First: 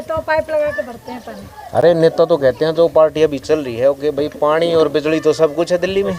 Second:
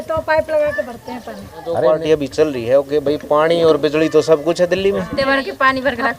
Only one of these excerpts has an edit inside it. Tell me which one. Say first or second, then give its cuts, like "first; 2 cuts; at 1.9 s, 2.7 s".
second; 2 cuts; at 1.8 s, 5.1 s